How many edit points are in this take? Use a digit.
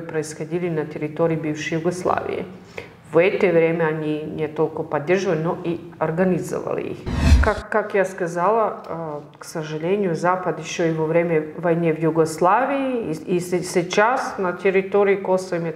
1